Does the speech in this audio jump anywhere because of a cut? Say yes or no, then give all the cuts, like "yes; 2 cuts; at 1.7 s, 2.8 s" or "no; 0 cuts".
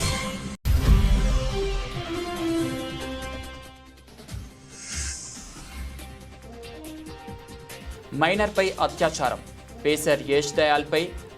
no; 0 cuts